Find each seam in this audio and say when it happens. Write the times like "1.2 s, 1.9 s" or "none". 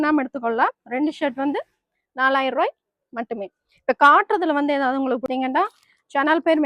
5.3 s